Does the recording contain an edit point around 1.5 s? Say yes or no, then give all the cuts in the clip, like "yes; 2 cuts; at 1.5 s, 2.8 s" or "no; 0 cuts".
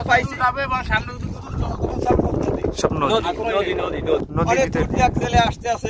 no; 1 cut; at 4.3 s